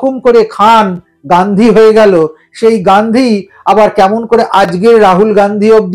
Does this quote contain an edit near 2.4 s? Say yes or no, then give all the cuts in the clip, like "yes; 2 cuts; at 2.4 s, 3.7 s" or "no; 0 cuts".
no; 0 cuts